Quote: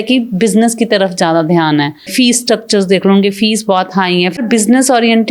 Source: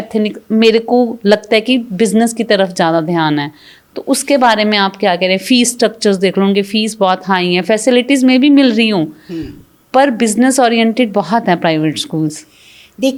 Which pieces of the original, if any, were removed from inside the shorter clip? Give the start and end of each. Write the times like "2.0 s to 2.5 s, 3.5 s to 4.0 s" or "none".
3.7 s to 5.4 s, 7.7 s to 10.1 s